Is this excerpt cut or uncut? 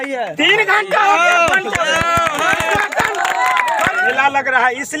cut